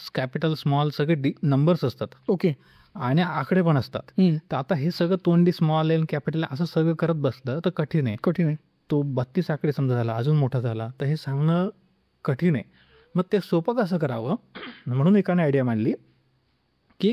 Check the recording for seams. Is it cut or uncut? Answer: uncut